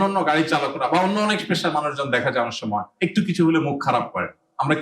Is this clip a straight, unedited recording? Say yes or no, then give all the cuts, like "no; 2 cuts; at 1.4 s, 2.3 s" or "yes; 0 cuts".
no; 1 cut; at 2.9 s